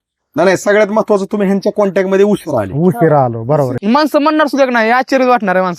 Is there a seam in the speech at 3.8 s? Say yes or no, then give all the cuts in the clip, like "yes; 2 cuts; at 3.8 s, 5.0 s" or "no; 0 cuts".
yes; 1 cut; at 3.8 s